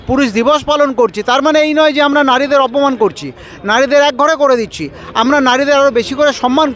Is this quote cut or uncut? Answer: uncut